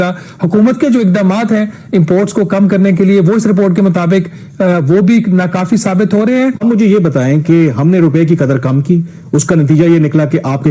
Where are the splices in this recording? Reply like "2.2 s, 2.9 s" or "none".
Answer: 6.6 s